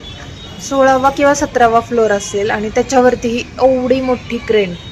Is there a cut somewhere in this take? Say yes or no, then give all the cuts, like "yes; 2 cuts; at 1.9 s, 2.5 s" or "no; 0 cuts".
no; 0 cuts